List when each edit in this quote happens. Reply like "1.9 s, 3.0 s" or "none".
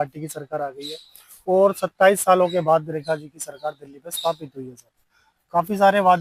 none